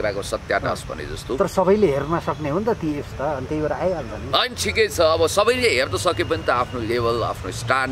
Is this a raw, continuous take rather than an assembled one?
yes; 0 cuts

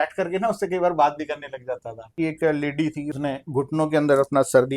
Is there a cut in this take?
yes; 2 cuts; at 2.1 s, 3.1 s

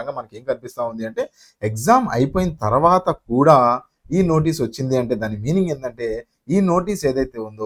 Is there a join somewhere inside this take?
no; 0 cuts

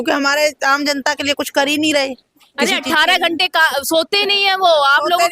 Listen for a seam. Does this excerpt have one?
no; 0 cuts

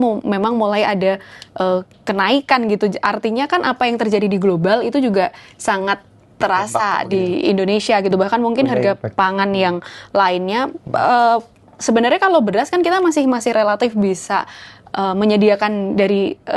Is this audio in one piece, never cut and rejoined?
yes; 0 cuts

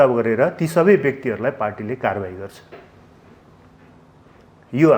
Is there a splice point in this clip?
no; 0 cuts

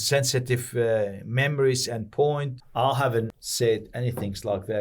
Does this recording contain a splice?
yes; 2 cuts; at 2.5 s, 3.3 s

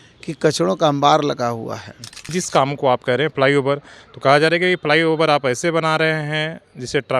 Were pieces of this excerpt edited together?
yes; 1 cut; at 2.2 s

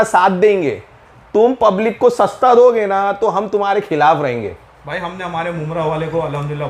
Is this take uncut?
yes; 0 cuts

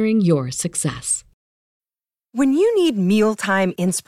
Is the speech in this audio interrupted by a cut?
yes; 1 cut; at 1.7 s

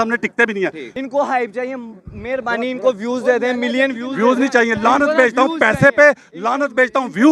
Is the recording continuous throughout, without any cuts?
no; 1 cut; at 0.9 s

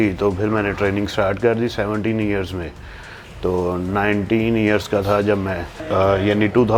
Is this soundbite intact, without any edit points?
yes; 0 cuts

